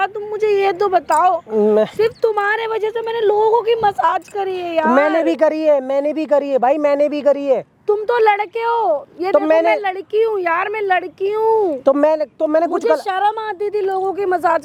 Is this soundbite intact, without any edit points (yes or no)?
yes